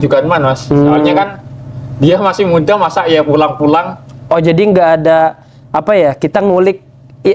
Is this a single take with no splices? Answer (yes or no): yes